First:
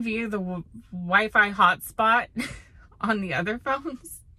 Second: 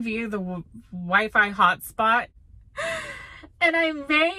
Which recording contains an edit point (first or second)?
second